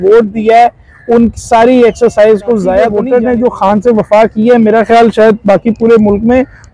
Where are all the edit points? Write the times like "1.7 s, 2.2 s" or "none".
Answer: 3.0 s